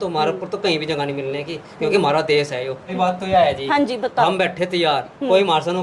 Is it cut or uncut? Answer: cut